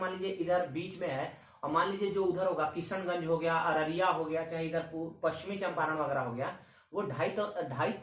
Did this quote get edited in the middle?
no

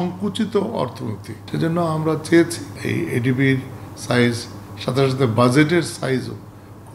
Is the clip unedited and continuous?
no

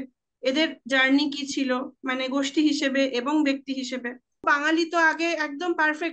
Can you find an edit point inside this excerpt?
yes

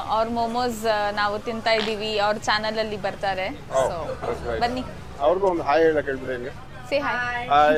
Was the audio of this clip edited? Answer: no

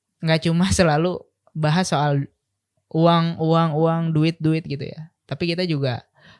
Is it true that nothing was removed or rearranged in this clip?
yes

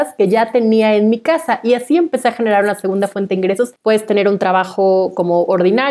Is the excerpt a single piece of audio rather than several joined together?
no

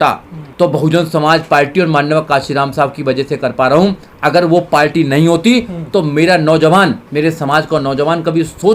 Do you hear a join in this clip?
no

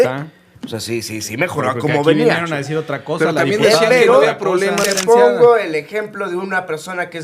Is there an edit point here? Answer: yes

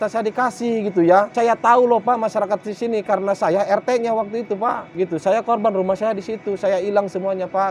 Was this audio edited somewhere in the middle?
no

